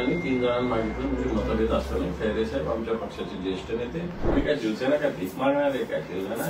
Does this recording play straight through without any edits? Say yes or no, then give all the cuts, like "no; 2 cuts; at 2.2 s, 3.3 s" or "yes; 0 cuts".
no; 1 cut; at 4.3 s